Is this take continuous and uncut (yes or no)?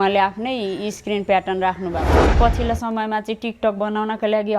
no